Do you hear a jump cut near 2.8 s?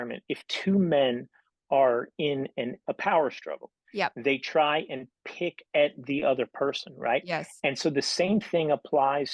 yes; 1 cut; at 2.8 s

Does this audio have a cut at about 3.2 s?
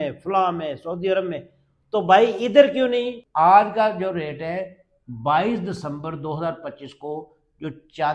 yes; 1 cut; at 3.2 s

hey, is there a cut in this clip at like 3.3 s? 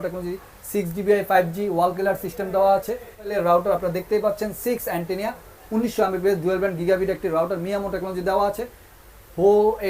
yes; 1 cut; at 3.3 s

